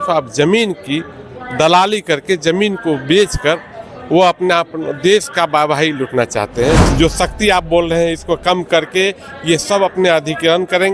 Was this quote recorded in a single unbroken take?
no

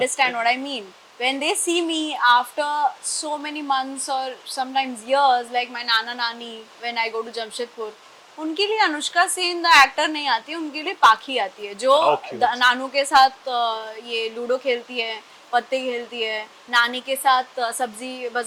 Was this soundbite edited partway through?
no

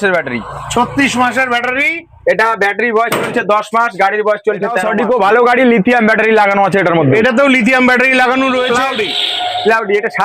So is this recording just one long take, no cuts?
no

